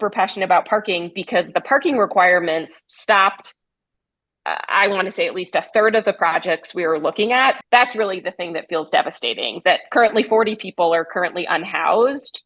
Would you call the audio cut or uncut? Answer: cut